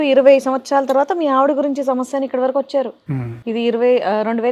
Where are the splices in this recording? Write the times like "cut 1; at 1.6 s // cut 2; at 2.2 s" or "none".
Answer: none